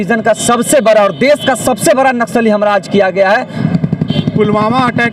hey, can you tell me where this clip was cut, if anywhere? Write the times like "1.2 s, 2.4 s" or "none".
3.5 s